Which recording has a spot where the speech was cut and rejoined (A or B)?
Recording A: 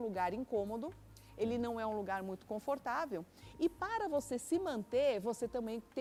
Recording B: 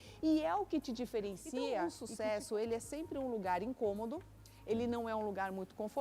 B